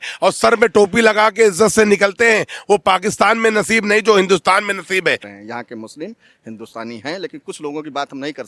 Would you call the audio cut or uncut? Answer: cut